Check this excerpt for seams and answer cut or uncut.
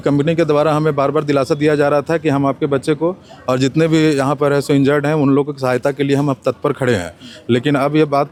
uncut